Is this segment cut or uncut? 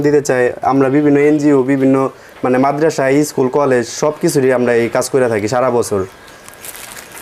uncut